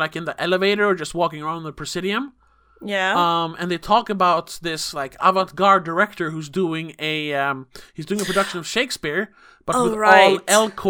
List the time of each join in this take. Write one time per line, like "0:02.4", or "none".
none